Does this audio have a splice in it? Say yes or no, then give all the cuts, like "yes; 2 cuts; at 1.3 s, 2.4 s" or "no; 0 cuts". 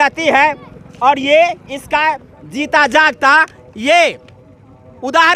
no; 0 cuts